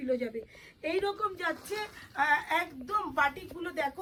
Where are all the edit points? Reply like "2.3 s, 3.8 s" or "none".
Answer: none